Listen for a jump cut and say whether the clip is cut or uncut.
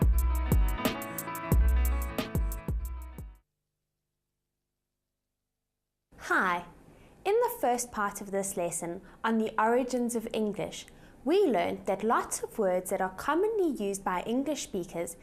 cut